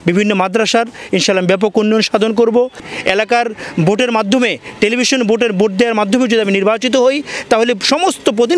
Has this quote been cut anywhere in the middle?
yes; 1 cut; at 2.9 s

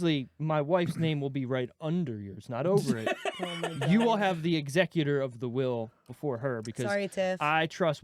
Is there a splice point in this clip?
no; 0 cuts

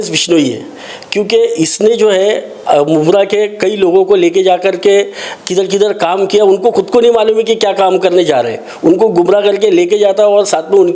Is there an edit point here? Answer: no; 0 cuts

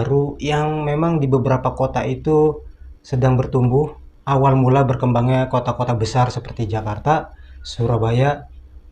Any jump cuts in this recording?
no; 0 cuts

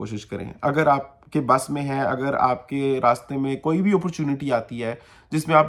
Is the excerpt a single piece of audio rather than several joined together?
yes; 0 cuts

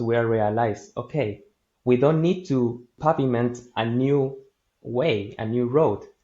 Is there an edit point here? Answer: yes; 1 cut; at 2.9 s

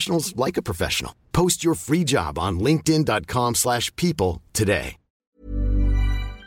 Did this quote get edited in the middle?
yes; 1 cut; at 5.4 s

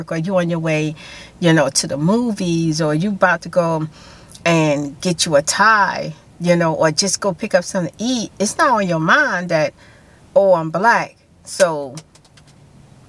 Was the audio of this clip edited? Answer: no; 0 cuts

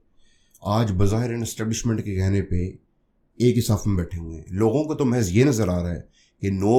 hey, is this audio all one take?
yes; 0 cuts

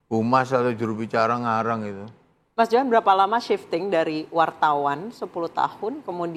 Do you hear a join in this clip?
no; 0 cuts

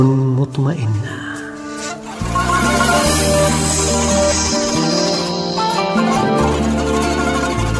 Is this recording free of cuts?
no; 1 cut; at 1.1 s

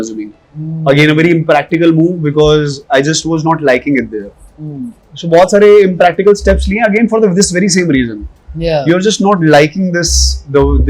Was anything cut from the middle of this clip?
no; 0 cuts

